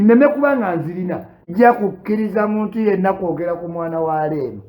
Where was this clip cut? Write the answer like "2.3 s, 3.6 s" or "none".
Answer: 1.4 s